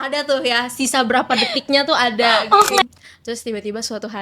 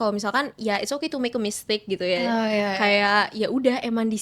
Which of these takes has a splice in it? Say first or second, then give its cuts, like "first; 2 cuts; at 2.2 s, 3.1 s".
first; 1 cut; at 2.8 s